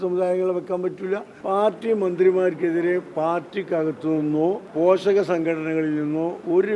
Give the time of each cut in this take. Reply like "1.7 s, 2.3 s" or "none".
1.3 s, 4.7 s